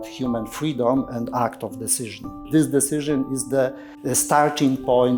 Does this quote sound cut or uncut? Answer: cut